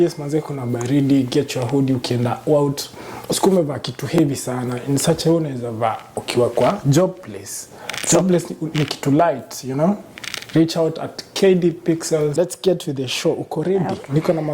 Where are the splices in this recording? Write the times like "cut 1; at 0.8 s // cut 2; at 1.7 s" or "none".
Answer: cut 1; at 12.3 s